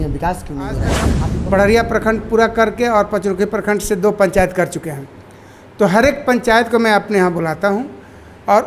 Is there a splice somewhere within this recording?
yes; 1 cut; at 1.1 s

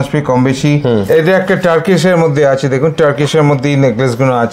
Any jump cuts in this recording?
yes; 1 cut; at 1.0 s

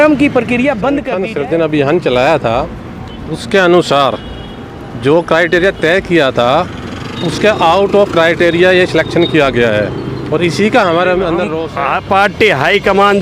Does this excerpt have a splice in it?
yes; 2 cuts; at 1.1 s, 11.6 s

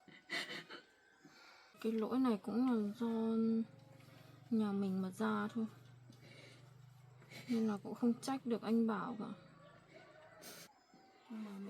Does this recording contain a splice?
yes; 2 cuts; at 1.8 s, 10.7 s

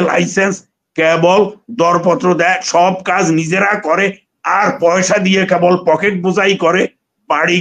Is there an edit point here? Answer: no; 0 cuts

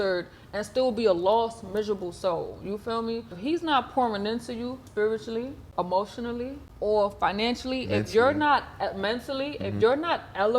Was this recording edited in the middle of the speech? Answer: yes; 4 cuts; at 3.4 s, 4.8 s, 5.6 s, 6.6 s

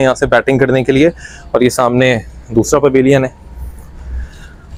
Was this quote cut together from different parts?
no; 0 cuts

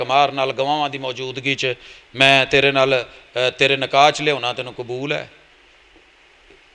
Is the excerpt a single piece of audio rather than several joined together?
yes; 0 cuts

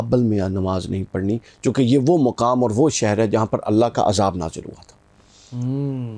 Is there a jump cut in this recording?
no; 0 cuts

